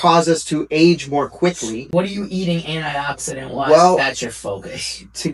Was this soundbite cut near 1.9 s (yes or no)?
yes